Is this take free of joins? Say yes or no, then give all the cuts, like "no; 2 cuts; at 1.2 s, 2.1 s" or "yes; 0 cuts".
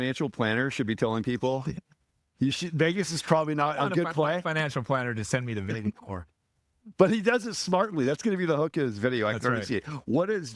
yes; 0 cuts